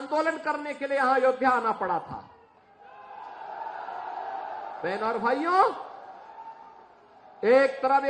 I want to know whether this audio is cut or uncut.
uncut